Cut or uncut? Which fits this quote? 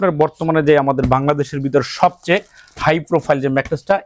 uncut